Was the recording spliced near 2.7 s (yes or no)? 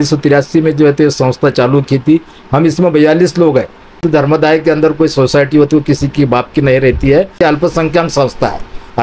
no